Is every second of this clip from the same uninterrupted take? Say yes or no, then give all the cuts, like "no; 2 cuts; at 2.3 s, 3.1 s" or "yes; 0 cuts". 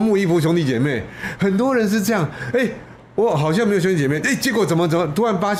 yes; 0 cuts